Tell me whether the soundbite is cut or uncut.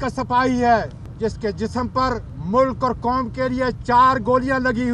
cut